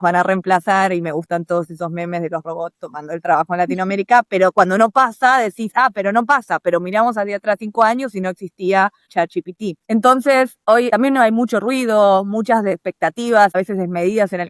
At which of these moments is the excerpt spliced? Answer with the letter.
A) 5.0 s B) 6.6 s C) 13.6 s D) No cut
C